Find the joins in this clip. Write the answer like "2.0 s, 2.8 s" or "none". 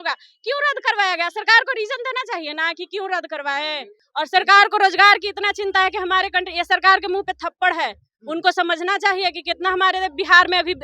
4.0 s